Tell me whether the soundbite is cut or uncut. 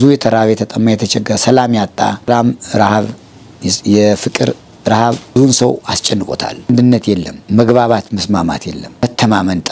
cut